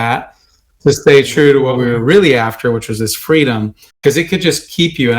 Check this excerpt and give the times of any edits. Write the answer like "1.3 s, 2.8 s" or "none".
1.7 s, 4.0 s